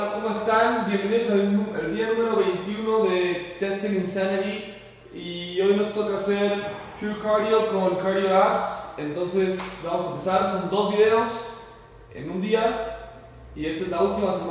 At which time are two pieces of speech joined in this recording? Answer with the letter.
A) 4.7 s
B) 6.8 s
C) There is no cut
A